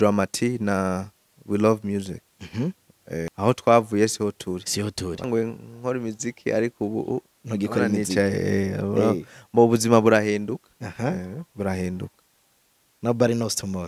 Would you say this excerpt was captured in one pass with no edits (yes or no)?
no